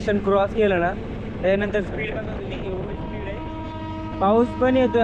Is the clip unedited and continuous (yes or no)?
yes